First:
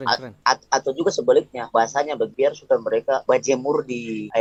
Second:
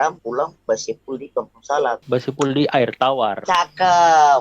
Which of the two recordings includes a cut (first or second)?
second